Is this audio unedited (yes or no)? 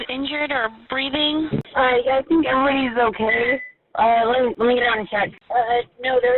no